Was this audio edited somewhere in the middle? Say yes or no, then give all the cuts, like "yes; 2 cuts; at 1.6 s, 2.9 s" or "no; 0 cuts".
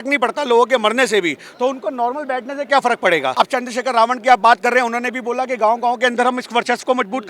yes; 1 cut; at 3.3 s